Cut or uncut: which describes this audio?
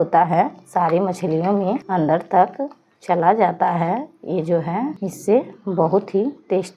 cut